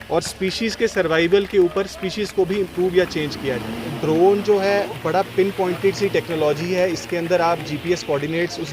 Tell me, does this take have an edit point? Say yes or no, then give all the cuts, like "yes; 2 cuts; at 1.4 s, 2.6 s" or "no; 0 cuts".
yes; 1 cut; at 3.9 s